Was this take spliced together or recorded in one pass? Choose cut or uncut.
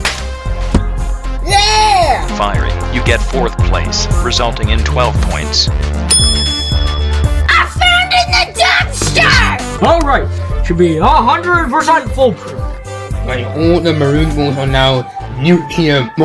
cut